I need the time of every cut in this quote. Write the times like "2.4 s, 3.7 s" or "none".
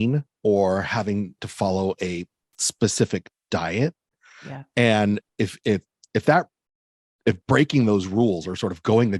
1.4 s